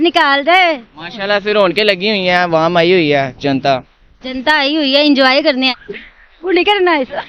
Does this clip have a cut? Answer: yes; 1 cut; at 5.7 s

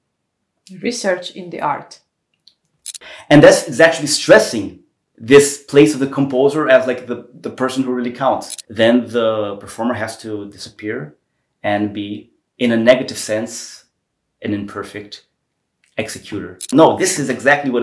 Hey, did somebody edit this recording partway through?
yes; 3 cuts; at 2.9 s, 8.6 s, 16.7 s

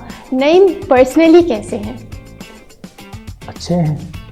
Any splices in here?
no; 0 cuts

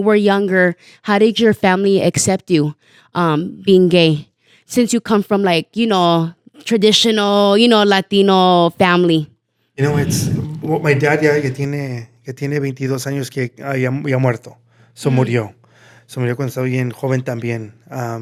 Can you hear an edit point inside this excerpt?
no; 0 cuts

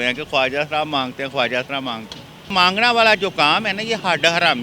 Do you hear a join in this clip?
yes; 1 cut; at 2.5 s

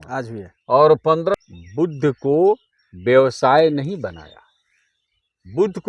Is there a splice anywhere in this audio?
yes; 1 cut; at 1.3 s

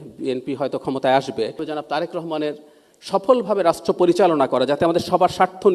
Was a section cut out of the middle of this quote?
yes; 1 cut; at 1.6 s

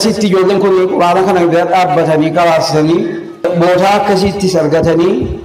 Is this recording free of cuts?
no; 1 cut; at 3.4 s

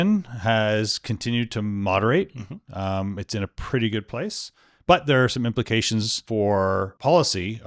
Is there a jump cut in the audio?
no; 0 cuts

